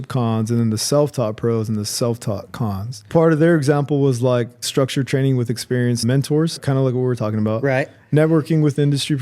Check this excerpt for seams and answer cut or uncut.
cut